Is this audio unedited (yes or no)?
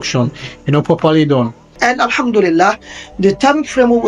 no